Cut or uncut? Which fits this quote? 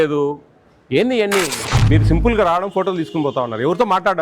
cut